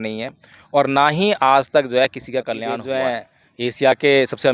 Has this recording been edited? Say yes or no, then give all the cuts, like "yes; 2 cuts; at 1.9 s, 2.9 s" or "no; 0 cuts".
yes; 1 cut; at 2.8 s